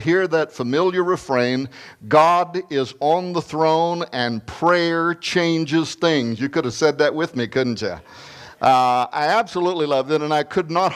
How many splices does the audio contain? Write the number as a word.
zero